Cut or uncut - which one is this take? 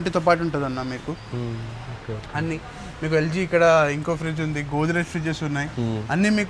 uncut